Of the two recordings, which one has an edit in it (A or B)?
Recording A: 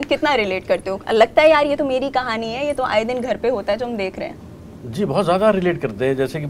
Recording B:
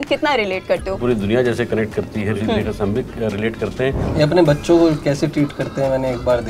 B